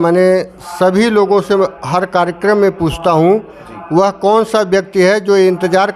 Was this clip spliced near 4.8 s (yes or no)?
no